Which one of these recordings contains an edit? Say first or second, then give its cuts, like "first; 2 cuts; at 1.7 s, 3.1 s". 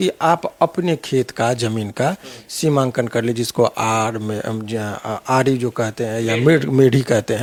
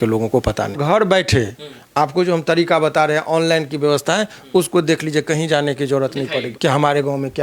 second; 2 cuts; at 0.8 s, 6.5 s